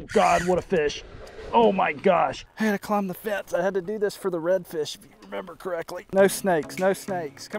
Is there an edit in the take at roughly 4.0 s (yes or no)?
no